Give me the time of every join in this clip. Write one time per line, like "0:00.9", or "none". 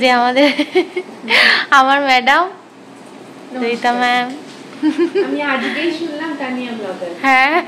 none

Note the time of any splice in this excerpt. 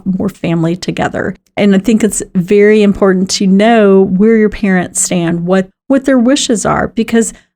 0:01.6

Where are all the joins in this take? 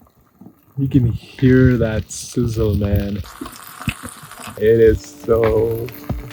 0:03.2
0:04.6

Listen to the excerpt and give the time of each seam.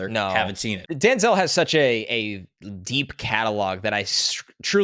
0:00.9

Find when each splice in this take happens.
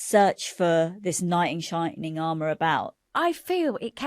0:03.1

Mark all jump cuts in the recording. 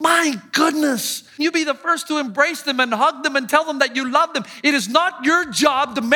0:01.4

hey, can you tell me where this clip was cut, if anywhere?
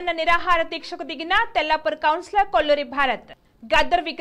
none

